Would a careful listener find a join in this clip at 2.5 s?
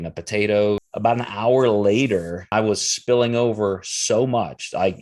yes; 2 cuts; at 0.8 s, 2.5 s

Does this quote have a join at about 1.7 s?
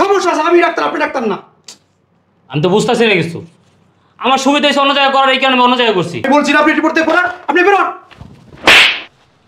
no; 1 cut; at 6.2 s

